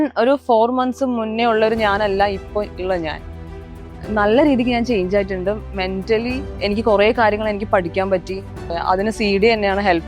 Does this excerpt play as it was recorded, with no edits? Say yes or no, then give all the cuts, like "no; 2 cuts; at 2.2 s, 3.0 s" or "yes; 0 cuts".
no; 2 cuts; at 6.5 s, 8.7 s